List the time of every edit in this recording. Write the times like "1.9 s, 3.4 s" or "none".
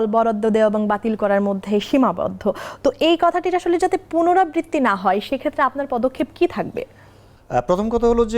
none